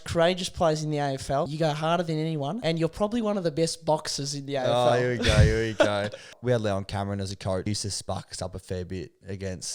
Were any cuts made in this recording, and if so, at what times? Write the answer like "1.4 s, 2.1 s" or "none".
1.5 s, 2.6 s, 6.3 s, 7.7 s